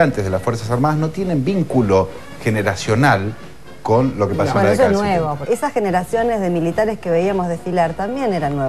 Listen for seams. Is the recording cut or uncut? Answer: cut